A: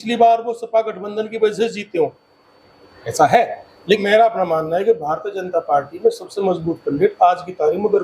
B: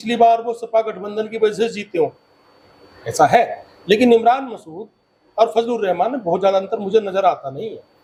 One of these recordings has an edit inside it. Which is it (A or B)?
A